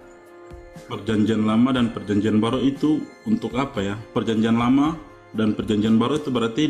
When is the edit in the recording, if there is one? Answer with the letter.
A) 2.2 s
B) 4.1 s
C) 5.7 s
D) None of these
B